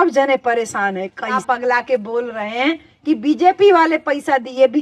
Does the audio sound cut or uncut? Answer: cut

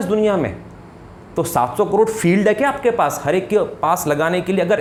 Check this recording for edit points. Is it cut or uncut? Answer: uncut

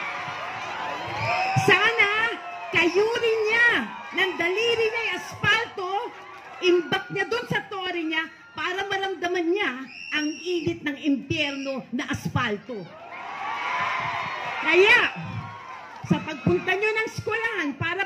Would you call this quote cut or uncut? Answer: uncut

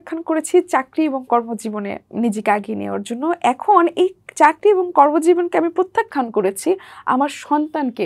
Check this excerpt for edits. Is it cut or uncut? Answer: uncut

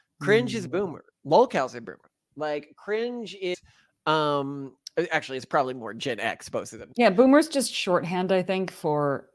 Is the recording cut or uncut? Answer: cut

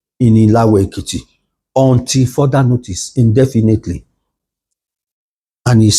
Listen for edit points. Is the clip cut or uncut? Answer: uncut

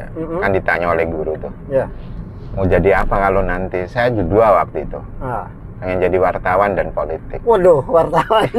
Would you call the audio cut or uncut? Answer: uncut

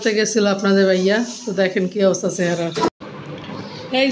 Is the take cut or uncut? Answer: cut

